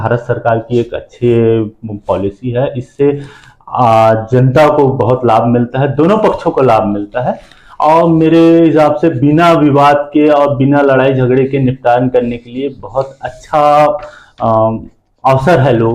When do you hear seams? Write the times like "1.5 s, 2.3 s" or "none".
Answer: none